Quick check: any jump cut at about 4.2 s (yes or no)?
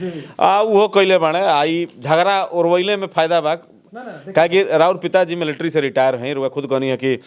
no